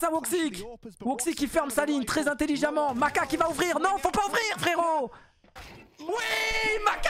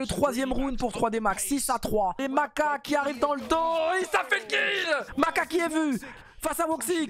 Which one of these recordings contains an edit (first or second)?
second